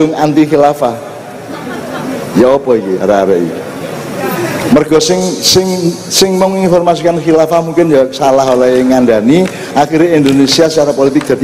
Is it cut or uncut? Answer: uncut